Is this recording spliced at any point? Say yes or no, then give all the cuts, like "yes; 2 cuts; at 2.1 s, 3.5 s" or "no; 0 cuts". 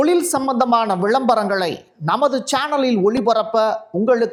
no; 0 cuts